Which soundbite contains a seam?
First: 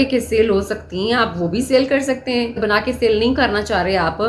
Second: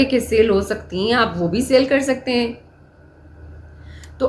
first; 1 cut; at 2.6 s

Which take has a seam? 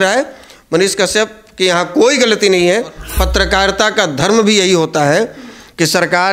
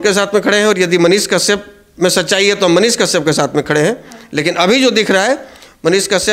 first; 1 cut; at 3.0 s

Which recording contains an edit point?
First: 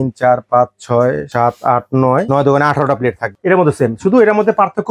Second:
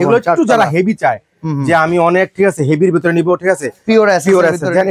first; 3 cuts; at 1.2 s, 2.3 s, 3.3 s

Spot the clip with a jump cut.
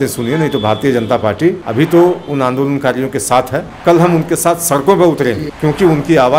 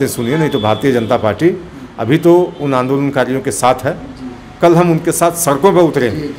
first; 3 cuts; at 1.6 s, 3.7 s, 5.5 s

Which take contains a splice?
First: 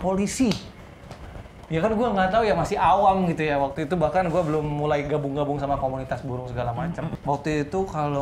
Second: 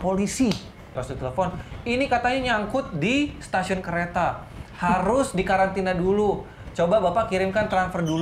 second; 1 cut; at 1.1 s

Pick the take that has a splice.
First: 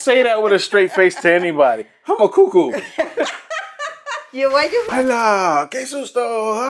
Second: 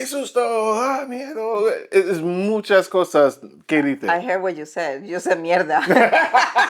first; 1 cut; at 4.9 s

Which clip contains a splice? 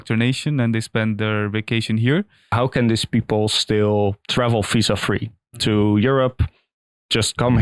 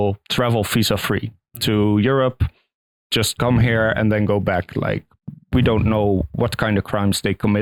first; 1 cut; at 2.5 s

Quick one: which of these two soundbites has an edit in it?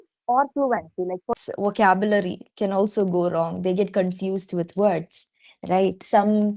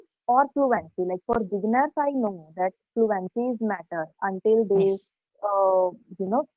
first; 1 cut; at 1.4 s

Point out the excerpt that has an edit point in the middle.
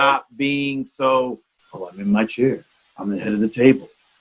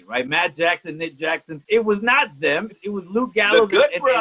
second; 2 cuts; at 1.5 s, 2.7 s

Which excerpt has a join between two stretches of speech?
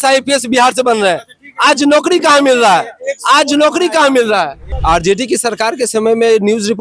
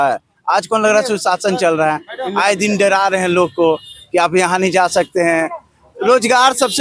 first; 1 cut; at 4.7 s

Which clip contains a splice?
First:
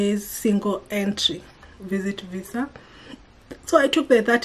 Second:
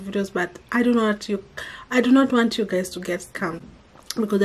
first; 1 cut; at 1.6 s

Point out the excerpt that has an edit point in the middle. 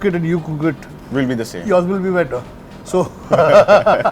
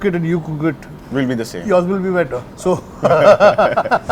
second; 1 cut; at 2.5 s

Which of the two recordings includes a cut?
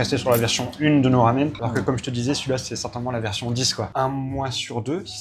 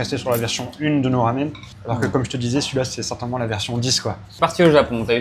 first; 2 cuts; at 1.6 s, 3.9 s

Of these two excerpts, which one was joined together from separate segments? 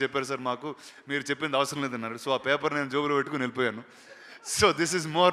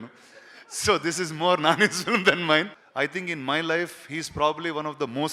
second; 1 cut; at 2.8 s

